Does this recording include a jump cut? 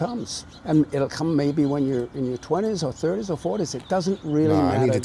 yes; 1 cut; at 3.3 s

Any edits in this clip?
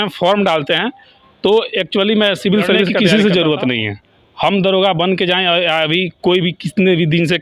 yes; 1 cut; at 2.9 s

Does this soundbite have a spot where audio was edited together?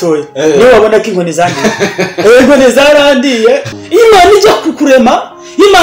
yes; 1 cut; at 3.7 s

